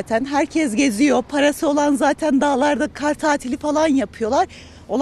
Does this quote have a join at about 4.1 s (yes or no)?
no